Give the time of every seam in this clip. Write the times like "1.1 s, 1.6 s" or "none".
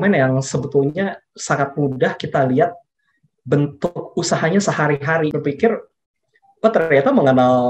5.3 s